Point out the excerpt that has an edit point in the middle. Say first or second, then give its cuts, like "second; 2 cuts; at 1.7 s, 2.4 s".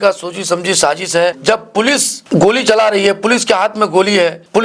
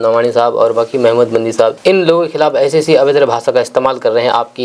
second; 1 cut; at 1.8 s